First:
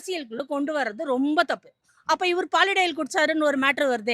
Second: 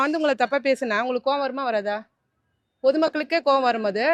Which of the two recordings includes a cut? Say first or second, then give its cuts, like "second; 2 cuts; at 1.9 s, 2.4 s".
first; 1 cut; at 1.9 s